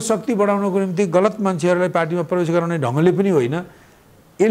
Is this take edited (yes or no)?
no